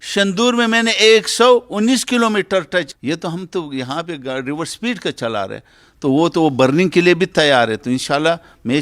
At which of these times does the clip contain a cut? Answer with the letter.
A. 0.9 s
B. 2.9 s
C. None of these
B